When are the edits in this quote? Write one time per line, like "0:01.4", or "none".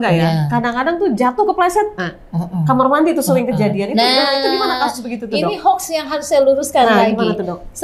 none